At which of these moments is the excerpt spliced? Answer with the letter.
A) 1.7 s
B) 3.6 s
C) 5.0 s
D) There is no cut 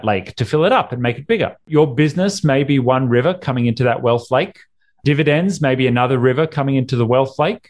A